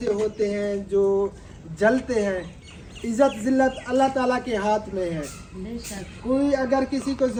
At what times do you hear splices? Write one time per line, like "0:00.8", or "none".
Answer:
none